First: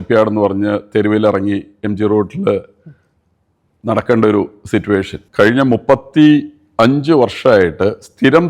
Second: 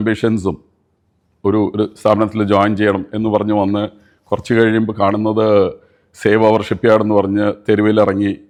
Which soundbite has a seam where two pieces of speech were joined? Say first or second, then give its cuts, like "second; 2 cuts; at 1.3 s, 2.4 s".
first; 1 cut; at 5.2 s